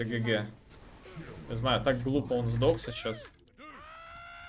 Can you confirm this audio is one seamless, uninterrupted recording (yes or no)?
no